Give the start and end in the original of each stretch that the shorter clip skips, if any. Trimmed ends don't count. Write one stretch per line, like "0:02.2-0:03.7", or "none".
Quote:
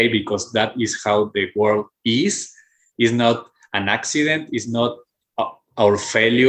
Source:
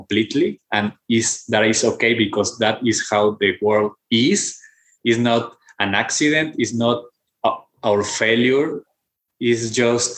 none